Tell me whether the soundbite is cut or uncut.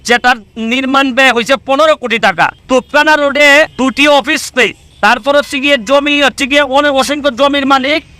cut